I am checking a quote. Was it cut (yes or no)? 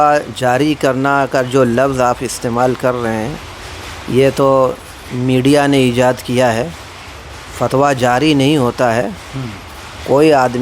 no